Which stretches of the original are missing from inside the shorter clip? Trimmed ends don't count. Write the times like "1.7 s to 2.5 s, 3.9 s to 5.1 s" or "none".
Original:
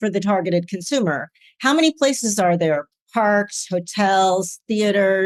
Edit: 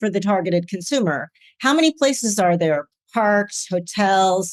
none